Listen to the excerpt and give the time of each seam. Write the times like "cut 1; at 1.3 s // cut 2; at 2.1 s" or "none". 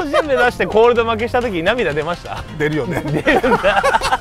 cut 1; at 2.4 s